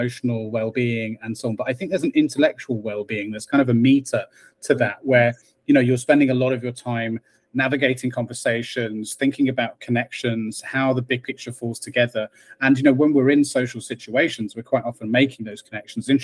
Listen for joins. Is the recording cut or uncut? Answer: uncut